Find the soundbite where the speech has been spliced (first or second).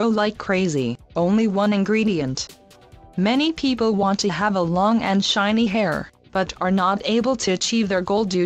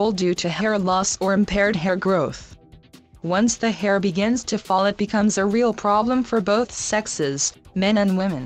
second